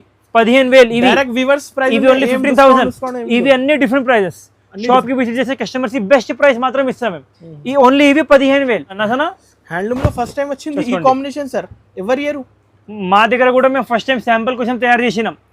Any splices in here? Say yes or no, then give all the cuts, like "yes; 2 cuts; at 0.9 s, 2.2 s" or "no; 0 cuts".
yes; 1 cut; at 9.0 s